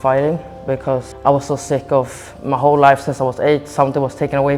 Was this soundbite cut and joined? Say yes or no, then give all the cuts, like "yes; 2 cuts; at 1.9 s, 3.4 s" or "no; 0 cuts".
yes; 1 cut; at 1.1 s